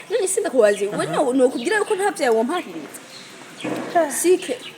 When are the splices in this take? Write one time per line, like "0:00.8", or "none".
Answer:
none

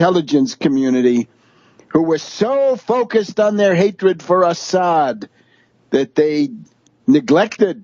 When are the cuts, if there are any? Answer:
0:02.8

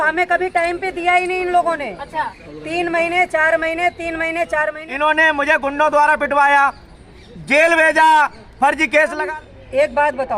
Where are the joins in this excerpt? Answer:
0:04.8
0:09.2

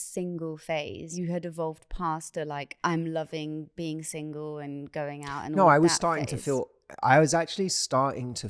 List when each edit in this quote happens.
0:01.1
0:02.7

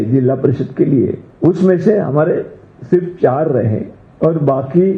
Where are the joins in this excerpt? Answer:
0:01.2
0:04.0

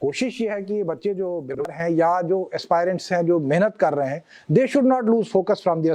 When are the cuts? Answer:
0:01.7

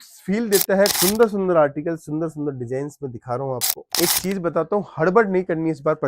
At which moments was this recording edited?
0:00.9
0:03.9

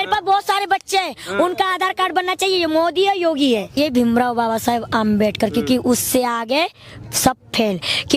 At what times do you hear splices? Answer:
0:03.8

